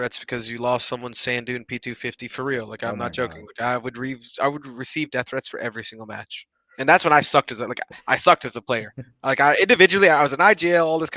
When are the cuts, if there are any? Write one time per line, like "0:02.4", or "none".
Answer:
none